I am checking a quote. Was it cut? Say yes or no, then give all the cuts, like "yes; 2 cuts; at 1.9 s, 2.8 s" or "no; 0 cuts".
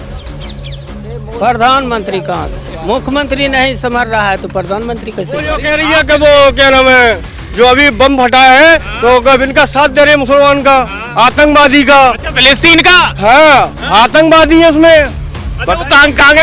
yes; 1 cut; at 5.5 s